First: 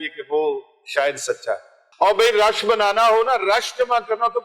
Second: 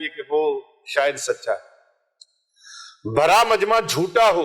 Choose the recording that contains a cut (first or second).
first